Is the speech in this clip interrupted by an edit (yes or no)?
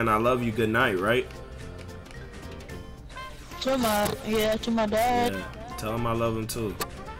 no